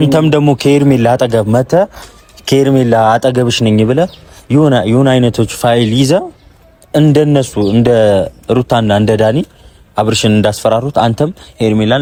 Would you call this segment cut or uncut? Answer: uncut